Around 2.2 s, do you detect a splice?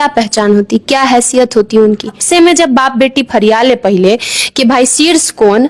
yes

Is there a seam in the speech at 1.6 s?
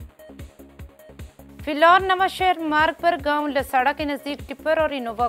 yes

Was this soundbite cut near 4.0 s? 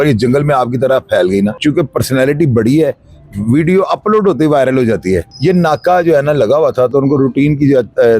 no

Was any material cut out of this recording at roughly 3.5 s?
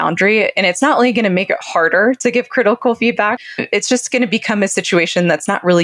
yes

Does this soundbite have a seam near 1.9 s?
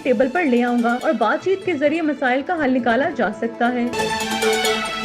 no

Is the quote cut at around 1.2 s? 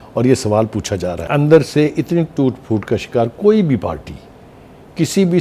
yes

